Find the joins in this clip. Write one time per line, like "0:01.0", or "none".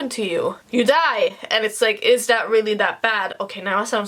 none